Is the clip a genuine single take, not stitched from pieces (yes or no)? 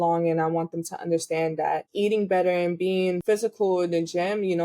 no